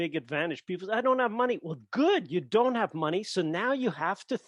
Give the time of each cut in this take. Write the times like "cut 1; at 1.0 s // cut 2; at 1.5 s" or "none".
none